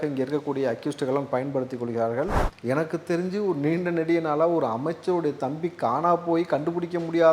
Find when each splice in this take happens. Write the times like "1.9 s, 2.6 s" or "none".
2.5 s